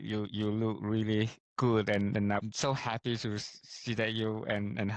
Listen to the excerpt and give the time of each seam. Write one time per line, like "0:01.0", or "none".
none